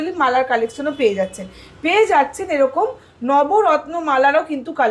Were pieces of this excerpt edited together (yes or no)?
no